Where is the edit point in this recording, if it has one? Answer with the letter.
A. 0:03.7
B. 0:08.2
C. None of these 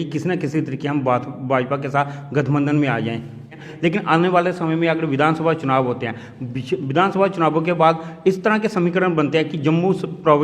A